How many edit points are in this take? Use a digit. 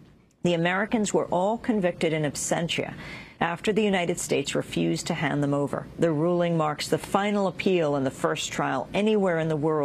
0